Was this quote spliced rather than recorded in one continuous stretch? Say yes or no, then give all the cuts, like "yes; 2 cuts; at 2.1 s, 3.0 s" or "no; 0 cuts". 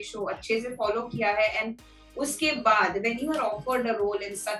no; 0 cuts